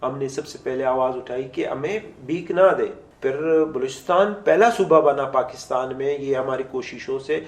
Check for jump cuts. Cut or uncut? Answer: cut